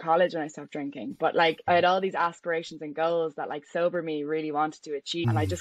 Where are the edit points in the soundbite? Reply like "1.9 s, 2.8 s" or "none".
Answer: 1.6 s